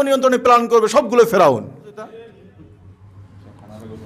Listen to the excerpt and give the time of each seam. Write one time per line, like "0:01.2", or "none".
0:02.3